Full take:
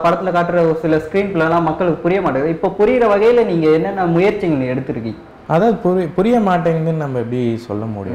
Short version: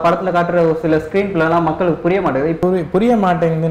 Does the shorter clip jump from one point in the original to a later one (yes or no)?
yes